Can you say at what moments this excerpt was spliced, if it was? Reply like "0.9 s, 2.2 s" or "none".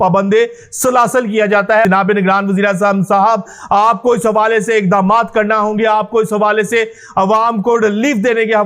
1.9 s